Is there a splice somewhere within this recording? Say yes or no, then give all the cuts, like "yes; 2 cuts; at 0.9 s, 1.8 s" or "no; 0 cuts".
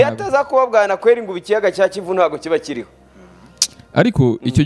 no; 0 cuts